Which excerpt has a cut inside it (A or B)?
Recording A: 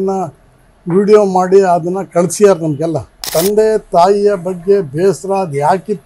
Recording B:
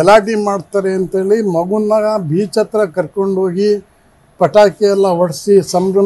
A